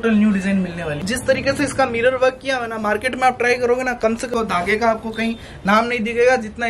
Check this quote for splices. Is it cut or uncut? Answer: cut